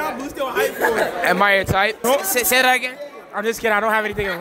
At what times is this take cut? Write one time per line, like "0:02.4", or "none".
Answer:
0:02.0